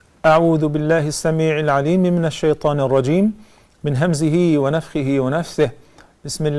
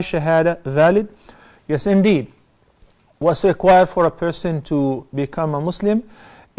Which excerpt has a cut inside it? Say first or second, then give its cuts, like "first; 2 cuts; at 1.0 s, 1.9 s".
second; 1 cut; at 2.6 s